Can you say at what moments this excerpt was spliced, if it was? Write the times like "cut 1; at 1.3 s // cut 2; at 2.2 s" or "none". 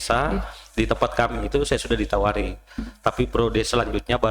none